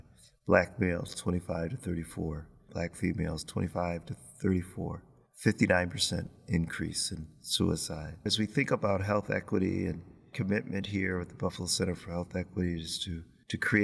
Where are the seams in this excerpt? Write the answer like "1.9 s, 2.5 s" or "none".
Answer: 2.7 s, 8.3 s

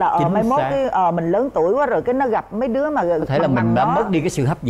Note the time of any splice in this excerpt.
none

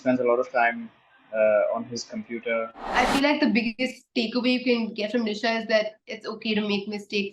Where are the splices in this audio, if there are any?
2.7 s

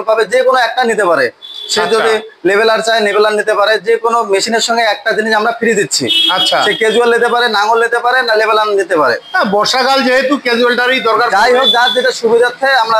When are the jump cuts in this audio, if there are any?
none

